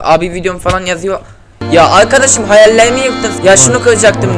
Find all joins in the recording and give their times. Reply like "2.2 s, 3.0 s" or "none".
3.3 s